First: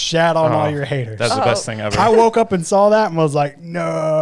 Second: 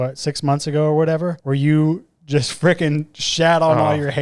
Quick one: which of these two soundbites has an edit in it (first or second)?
second